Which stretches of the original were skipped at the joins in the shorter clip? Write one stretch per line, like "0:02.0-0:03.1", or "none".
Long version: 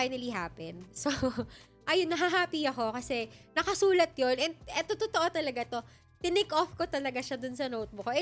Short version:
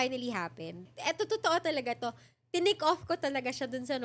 0:00.9-0:04.6